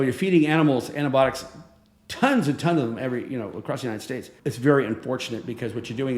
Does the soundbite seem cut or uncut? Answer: cut